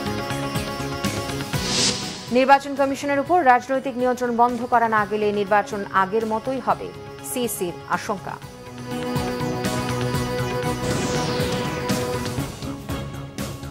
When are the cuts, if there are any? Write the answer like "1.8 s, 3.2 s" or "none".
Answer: 12.7 s